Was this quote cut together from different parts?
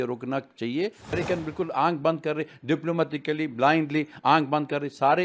yes; 1 cut; at 1.1 s

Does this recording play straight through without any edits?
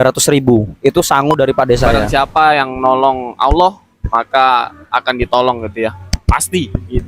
no; 1 cut; at 2.0 s

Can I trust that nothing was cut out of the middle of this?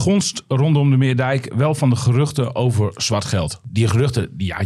no; 1 cut; at 3.7 s

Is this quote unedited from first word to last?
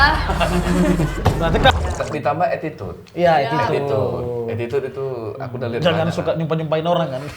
no; 1 cut; at 1.7 s

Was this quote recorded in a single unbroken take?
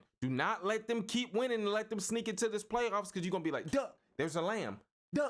yes; 0 cuts

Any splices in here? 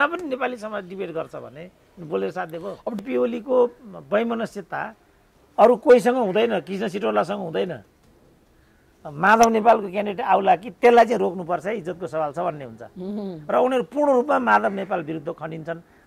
yes; 1 cut; at 3.0 s

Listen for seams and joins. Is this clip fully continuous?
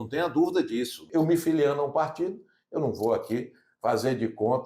no; 1 cut; at 1.1 s

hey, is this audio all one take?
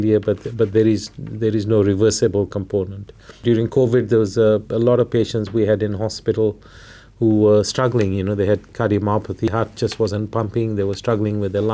no; 2 cuts; at 3.4 s, 9.5 s

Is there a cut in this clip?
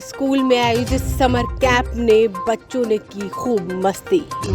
no; 0 cuts

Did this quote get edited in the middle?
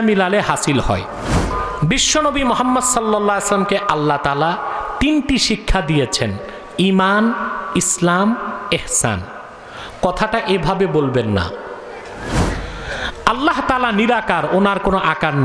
yes; 2 cuts; at 1.5 s, 12.4 s

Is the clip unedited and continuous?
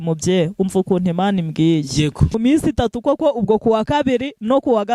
no; 1 cut; at 2.4 s

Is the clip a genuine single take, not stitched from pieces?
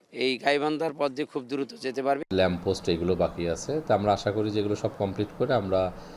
no; 1 cut; at 2.3 s

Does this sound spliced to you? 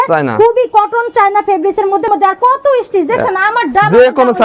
yes; 1 cut; at 2.1 s

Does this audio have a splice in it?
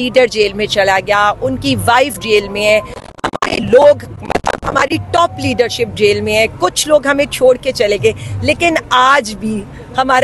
no; 0 cuts

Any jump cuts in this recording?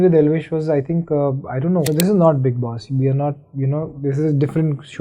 yes; 1 cut; at 1.9 s

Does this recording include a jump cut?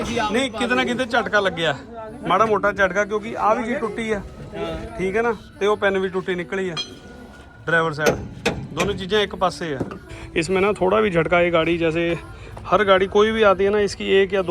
yes; 1 cut; at 10.1 s

